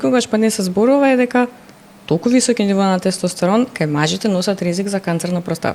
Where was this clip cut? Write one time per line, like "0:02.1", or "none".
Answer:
none